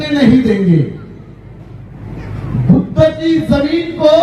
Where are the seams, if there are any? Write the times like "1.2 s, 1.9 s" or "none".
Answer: none

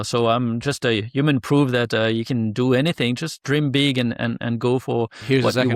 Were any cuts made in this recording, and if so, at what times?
none

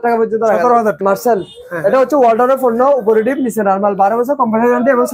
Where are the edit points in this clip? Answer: 1.0 s

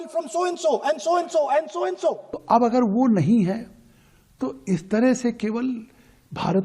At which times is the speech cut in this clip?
2.3 s

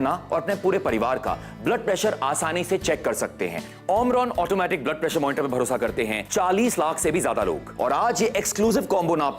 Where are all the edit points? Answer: 3.6 s, 6.2 s, 7.7 s

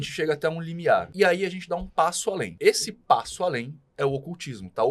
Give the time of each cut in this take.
1.1 s, 2.5 s

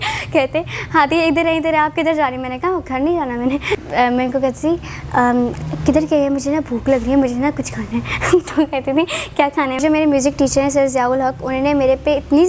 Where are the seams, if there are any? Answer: 3.8 s, 9.7 s

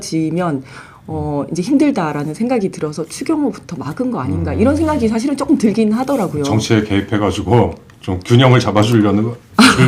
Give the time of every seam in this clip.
none

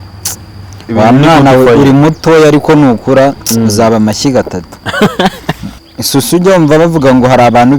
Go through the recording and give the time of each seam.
5.7 s

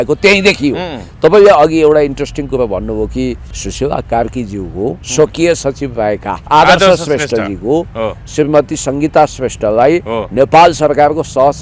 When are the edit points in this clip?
none

